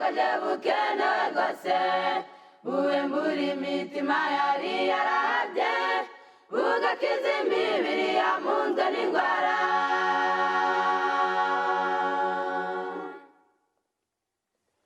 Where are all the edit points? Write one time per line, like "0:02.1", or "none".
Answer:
0:02.1